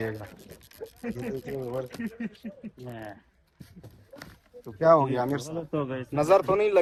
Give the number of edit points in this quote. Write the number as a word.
zero